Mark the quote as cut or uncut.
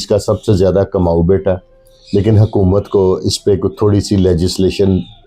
uncut